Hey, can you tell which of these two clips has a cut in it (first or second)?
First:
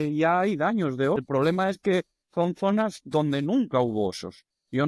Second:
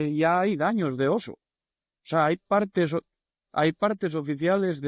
first